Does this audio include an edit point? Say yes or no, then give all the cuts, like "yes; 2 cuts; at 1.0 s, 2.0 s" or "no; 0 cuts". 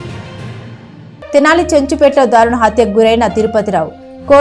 yes; 1 cut; at 1.3 s